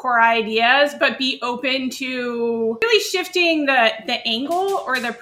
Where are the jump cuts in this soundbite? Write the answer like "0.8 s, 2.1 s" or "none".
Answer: 2.8 s